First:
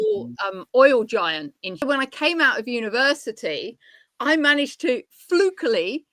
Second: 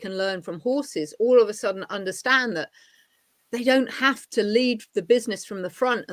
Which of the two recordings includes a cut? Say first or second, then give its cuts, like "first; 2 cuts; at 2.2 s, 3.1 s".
first; 1 cut; at 1.8 s